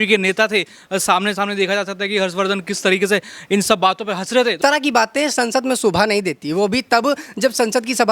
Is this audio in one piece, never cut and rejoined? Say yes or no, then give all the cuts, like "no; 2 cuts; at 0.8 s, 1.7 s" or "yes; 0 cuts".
no; 1 cut; at 4.6 s